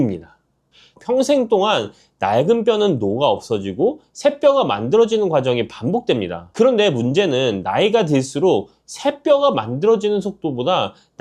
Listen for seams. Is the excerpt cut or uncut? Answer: cut